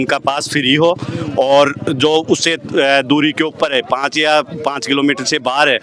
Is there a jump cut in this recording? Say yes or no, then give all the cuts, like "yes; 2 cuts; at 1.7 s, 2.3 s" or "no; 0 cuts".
no; 0 cuts